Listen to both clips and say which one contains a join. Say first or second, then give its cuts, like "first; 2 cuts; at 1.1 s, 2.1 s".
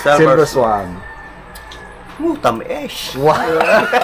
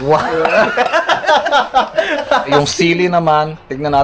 second; 1 cut; at 2.5 s